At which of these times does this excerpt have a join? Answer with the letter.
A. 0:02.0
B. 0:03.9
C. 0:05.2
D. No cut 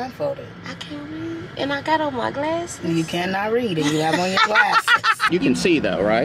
C